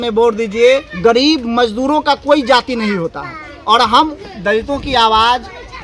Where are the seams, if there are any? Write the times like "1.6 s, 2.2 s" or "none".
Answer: 0.9 s, 4.2 s

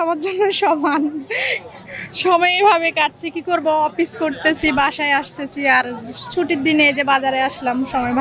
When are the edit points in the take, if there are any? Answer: none

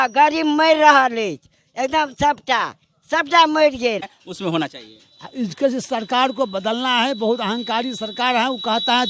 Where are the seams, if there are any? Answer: 4.2 s

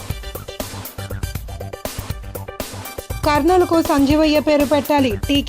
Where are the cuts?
none

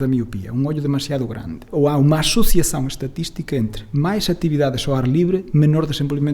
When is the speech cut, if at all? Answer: 1.6 s

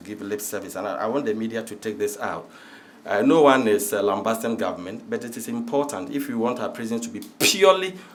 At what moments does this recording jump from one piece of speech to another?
none

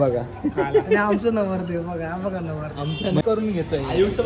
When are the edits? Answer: 3.2 s

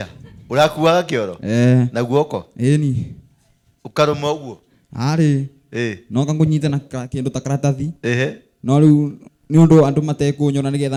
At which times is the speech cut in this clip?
none

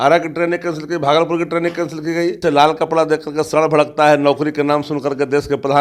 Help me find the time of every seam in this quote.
2.4 s

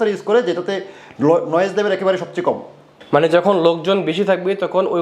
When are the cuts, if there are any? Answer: 2.9 s

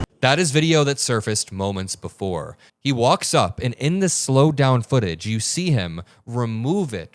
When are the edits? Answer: 2.6 s

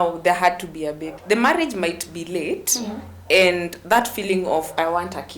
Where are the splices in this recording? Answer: 1.1 s

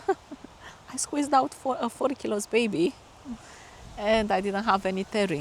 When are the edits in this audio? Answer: none

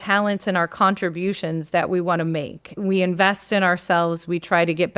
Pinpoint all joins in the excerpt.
2.8 s

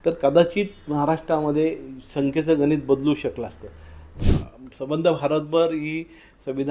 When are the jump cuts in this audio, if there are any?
4.1 s

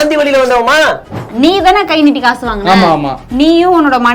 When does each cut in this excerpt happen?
1.1 s

